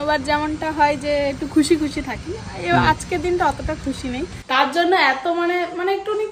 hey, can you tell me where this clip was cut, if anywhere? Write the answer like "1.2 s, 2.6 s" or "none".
4.3 s